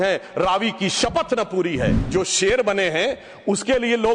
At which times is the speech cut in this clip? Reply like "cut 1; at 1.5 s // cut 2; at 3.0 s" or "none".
cut 1; at 2.0 s

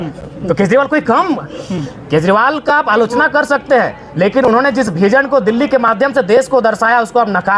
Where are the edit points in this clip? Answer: none

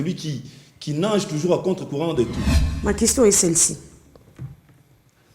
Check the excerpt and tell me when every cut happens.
cut 1; at 2.4 s

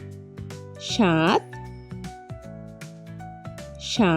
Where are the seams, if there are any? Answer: cut 1; at 0.9 s

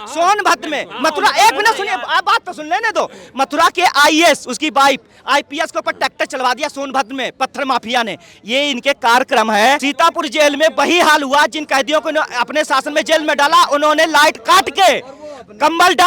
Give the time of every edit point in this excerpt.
cut 1; at 9.9 s

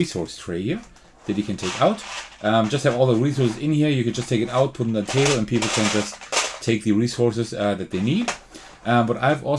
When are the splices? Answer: none

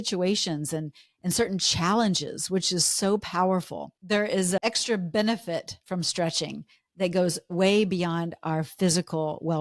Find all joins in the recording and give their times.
cut 1; at 4.4 s

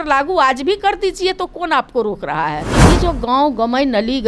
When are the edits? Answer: cut 1; at 2.9 s

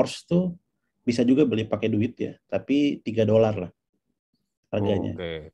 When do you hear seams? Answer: none

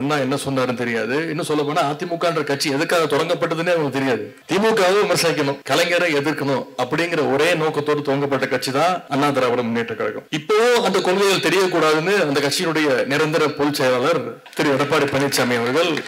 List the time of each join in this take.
cut 1; at 4.3 s // cut 2; at 5.6 s // cut 3; at 9.0 s // cut 4; at 10.3 s // cut 5; at 14.4 s

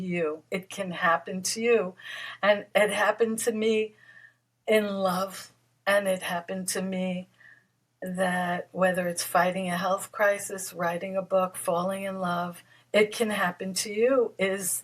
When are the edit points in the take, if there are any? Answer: cut 1; at 2.7 s

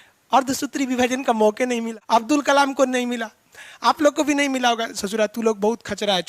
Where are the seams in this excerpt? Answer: cut 1; at 1.9 s

